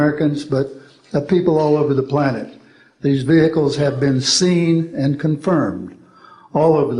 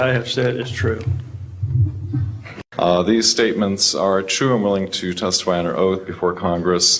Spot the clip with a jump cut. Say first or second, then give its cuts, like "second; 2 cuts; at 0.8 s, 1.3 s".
second; 1 cut; at 2.5 s